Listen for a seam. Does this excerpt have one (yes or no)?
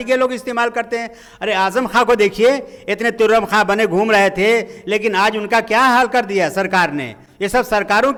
no